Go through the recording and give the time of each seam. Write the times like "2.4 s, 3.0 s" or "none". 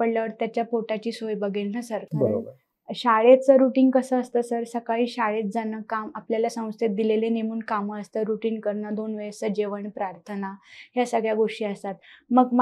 none

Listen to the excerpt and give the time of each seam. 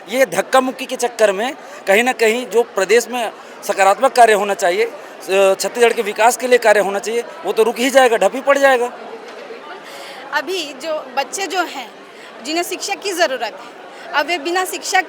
none

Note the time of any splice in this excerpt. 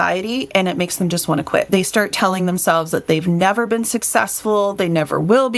1.7 s

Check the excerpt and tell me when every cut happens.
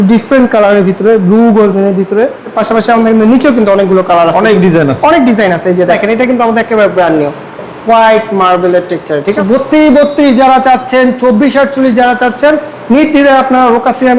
2.6 s, 5.9 s, 9.3 s

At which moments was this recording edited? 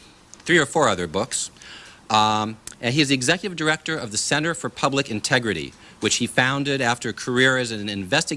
2.6 s

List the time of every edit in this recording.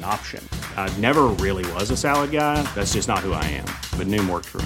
none

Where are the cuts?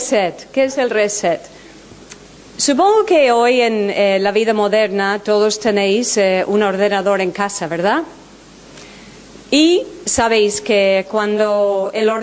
9.9 s

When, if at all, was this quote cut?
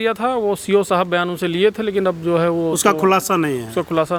none

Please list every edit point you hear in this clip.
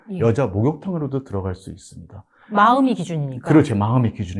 none

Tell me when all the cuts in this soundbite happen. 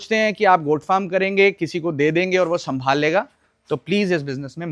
none

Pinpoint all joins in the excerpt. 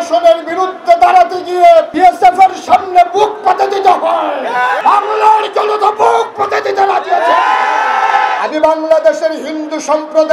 1.9 s, 4.8 s, 8.4 s

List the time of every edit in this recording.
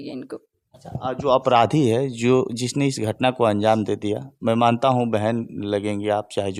none

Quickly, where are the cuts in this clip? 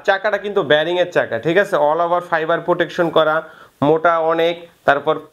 none

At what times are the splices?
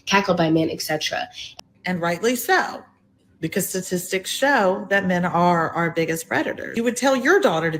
1.4 s, 6.7 s

